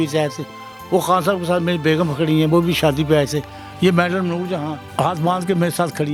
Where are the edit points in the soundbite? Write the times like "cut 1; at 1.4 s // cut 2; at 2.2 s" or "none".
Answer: none